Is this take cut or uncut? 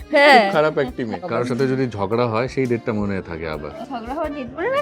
cut